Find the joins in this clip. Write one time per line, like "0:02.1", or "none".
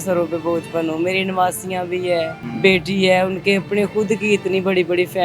0:02.4